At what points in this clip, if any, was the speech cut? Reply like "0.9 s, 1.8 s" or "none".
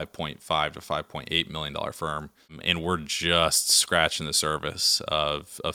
2.6 s